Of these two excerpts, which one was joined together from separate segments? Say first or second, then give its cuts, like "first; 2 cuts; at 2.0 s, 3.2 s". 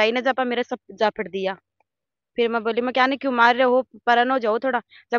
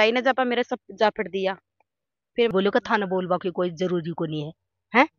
second; 1 cut; at 2.5 s